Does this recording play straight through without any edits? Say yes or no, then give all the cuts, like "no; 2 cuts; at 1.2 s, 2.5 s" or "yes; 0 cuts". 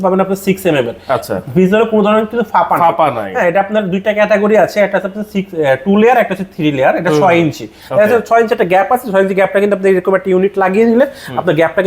yes; 0 cuts